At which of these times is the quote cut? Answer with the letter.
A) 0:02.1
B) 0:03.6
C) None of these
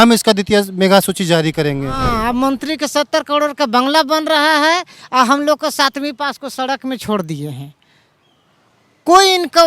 A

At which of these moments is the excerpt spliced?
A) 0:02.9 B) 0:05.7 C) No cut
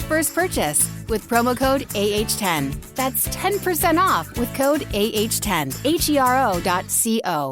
B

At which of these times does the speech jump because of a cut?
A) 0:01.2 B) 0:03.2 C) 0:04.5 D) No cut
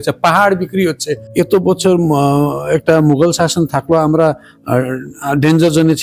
A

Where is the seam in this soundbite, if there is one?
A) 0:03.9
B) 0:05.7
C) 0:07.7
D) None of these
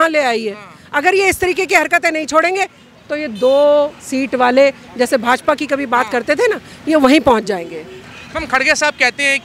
D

